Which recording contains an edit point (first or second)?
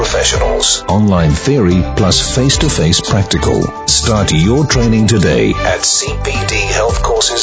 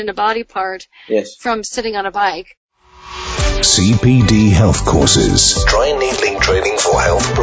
second